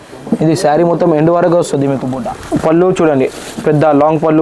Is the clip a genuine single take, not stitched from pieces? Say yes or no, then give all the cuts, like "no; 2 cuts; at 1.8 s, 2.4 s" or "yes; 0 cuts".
no; 1 cut; at 2.1 s